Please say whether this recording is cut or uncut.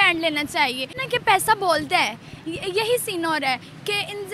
cut